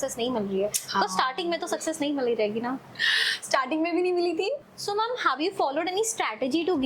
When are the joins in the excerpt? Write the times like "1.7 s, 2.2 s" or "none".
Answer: 4.6 s